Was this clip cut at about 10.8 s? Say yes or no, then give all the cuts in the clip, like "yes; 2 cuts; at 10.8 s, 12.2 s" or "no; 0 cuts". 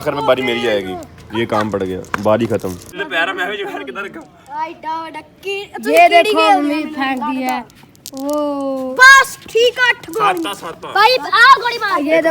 no; 1 cut; at 2.9 s